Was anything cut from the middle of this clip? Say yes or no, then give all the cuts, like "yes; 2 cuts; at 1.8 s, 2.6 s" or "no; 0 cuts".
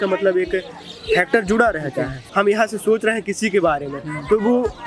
yes; 1 cut; at 2.2 s